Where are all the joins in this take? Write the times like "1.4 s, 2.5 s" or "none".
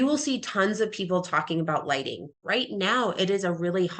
2.4 s

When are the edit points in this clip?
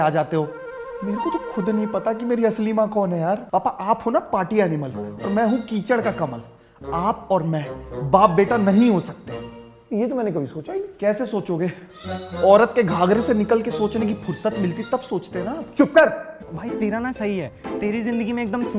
3.4 s, 16.4 s

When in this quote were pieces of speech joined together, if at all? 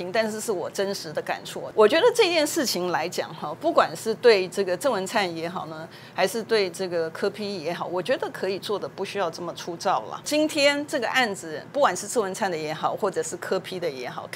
1.6 s, 10.2 s

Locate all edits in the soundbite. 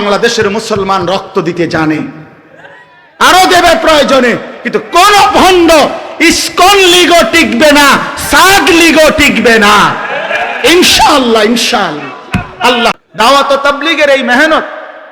13.0 s

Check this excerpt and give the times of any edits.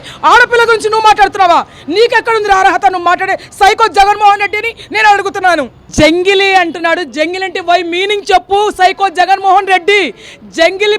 5.8 s

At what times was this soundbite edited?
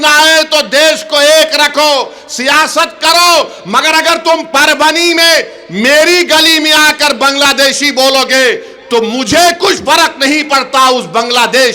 none

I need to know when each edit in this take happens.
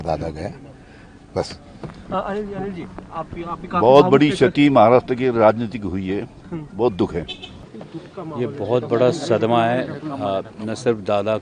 none

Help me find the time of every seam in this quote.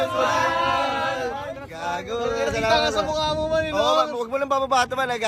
none

